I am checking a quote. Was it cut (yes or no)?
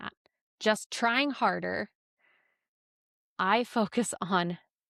no